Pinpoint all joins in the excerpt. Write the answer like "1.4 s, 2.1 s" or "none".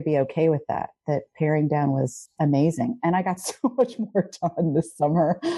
none